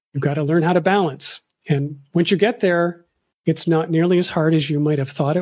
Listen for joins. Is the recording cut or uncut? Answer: uncut